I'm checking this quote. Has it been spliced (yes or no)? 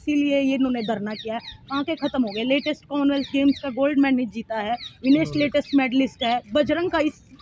no